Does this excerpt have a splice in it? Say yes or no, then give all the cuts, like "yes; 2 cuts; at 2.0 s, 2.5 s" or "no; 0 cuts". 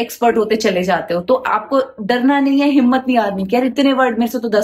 no; 0 cuts